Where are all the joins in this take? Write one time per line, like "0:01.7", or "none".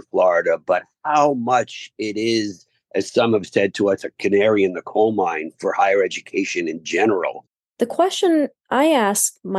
0:07.4